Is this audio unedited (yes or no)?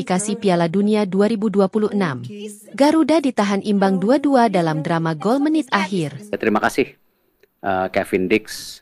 no